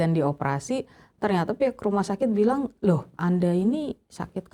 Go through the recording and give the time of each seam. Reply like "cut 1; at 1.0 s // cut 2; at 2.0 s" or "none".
cut 1; at 3.1 s